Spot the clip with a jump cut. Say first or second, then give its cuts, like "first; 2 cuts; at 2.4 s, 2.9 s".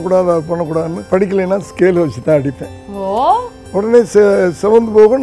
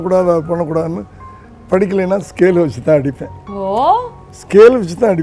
first; 2 cuts; at 1.0 s, 3.6 s